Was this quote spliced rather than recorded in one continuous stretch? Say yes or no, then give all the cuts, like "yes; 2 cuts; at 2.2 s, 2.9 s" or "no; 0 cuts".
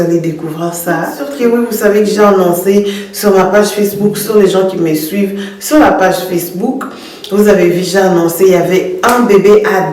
yes; 1 cut; at 1.2 s